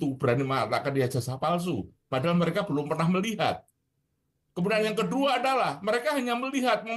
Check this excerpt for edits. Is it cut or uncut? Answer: uncut